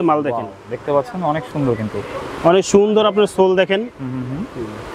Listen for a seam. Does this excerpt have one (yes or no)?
no